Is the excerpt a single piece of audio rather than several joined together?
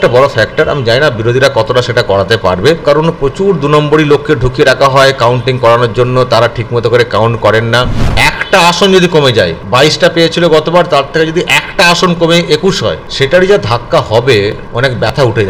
no; 5 cuts; at 2.8 s, 8.0 s, 9.6 s, 13.1 s, 14.6 s

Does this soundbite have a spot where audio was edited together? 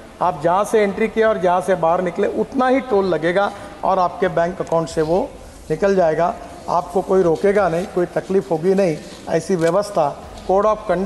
no; 0 cuts

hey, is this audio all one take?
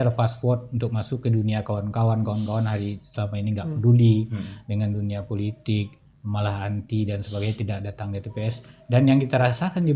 yes; 0 cuts

